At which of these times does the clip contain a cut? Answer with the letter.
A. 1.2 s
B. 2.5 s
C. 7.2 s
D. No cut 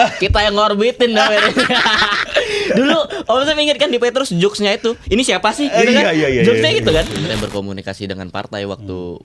C